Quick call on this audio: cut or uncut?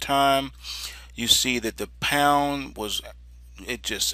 cut